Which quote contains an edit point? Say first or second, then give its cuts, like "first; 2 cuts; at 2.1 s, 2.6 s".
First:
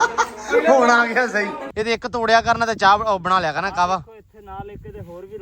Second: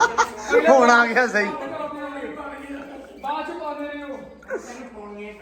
first; 1 cut; at 1.6 s